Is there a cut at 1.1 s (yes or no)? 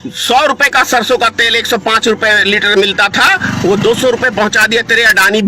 no